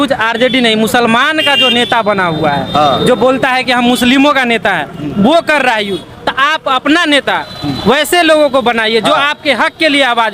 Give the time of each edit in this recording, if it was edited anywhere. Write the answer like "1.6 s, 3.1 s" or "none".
none